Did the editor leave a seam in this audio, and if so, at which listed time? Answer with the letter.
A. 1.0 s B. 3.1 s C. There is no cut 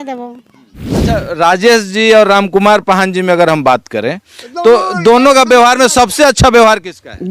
A